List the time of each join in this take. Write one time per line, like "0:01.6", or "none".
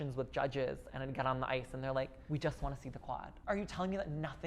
0:02.2
0:03.3